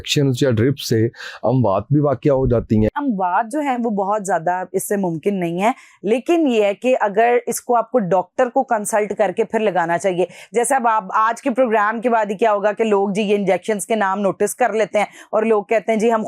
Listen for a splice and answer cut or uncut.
cut